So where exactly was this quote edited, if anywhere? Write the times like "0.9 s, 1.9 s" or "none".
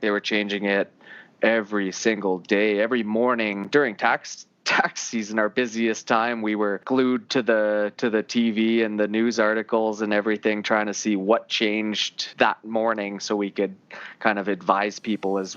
3.6 s, 6.8 s, 12.2 s